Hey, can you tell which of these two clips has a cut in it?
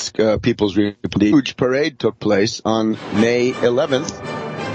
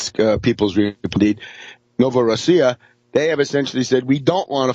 second; 1 cut; at 1.3 s

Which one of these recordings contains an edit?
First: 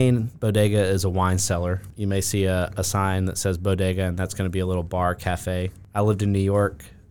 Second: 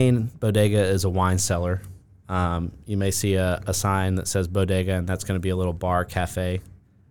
first; 2 cuts; at 1.9 s, 5.8 s

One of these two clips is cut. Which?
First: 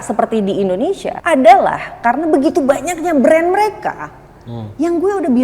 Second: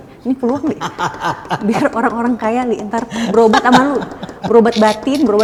first; 1 cut; at 1.1 s

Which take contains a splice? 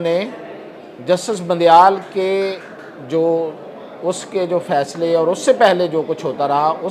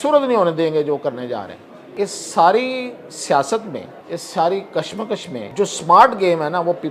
second; 3 cuts; at 1.8 s, 3.9 s, 5.4 s

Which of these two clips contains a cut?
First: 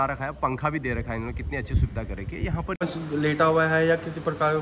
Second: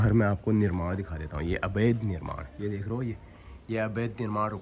first; 1 cut; at 2.8 s

